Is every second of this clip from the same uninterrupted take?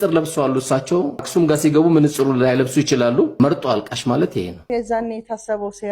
no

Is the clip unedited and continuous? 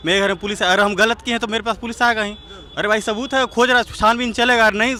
yes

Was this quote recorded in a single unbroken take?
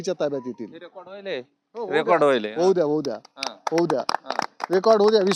yes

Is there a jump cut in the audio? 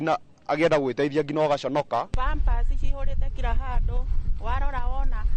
yes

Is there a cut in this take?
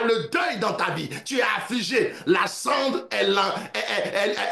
no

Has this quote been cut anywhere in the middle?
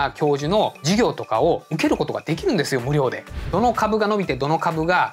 yes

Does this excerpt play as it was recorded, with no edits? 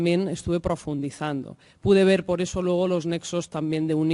no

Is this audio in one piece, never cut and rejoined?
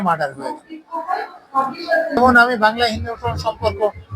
no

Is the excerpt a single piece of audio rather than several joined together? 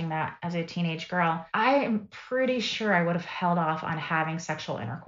no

